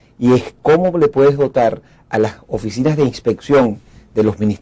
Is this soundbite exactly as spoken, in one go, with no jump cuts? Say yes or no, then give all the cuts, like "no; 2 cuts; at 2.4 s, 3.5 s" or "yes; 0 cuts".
yes; 0 cuts